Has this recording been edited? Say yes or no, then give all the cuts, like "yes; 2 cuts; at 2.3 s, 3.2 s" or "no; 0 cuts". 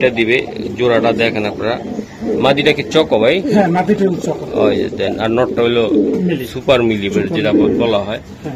no; 0 cuts